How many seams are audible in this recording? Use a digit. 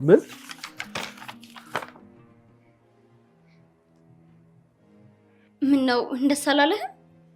0